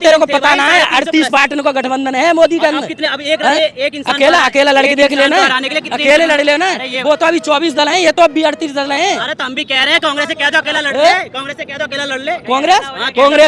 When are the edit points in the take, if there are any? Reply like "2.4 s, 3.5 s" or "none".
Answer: none